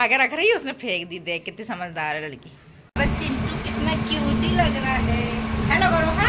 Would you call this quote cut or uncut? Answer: cut